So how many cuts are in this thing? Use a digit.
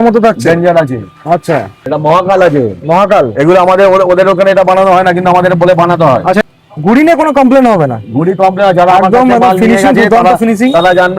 2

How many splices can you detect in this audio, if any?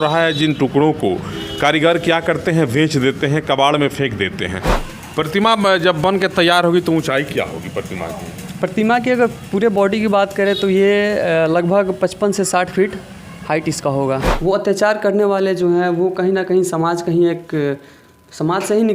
2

